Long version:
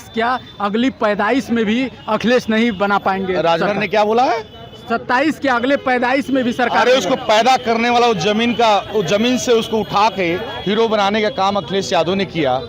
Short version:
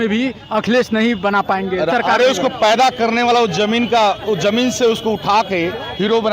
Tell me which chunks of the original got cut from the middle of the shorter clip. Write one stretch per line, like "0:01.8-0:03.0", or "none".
0:03.5-0:06.6